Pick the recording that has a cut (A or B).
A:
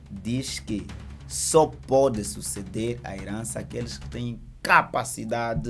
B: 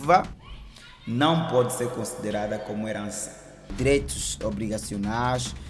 B